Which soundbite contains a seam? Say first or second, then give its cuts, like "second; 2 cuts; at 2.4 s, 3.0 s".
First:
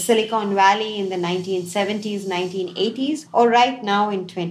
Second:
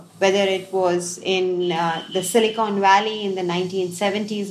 first; 1 cut; at 3.2 s